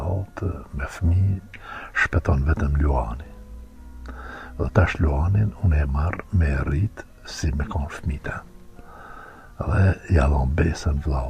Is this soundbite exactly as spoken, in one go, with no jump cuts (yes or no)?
yes